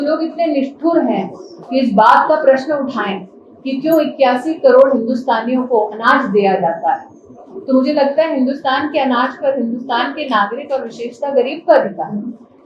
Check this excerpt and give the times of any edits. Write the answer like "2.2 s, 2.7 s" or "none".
none